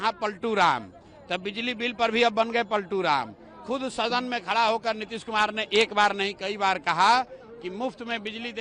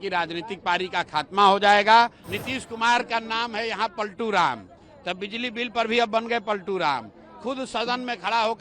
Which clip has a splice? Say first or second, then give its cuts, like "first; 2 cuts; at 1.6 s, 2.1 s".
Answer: second; 1 cut; at 2.3 s